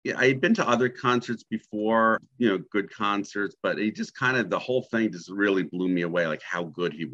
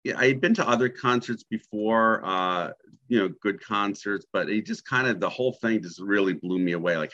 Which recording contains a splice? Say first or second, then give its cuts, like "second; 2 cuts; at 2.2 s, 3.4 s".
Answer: first; 1 cut; at 2.2 s